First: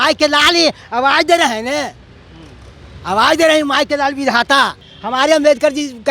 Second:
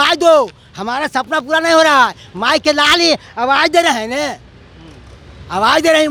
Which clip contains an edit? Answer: first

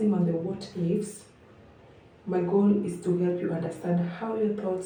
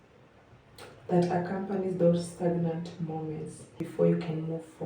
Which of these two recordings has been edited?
second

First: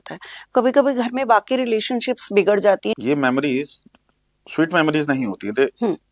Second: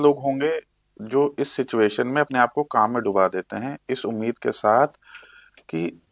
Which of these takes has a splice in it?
first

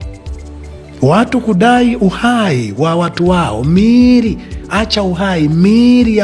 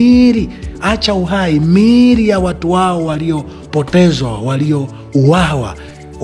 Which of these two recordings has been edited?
first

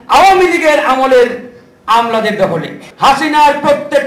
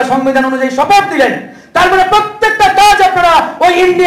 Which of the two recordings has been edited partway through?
first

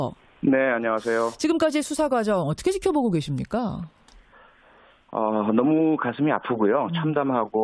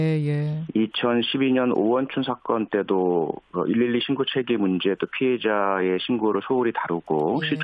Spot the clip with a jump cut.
first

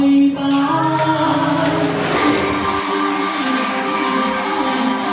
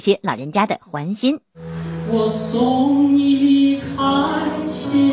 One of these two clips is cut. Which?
first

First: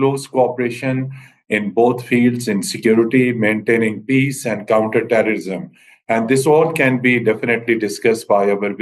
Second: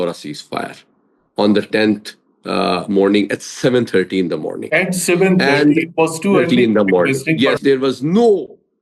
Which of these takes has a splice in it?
second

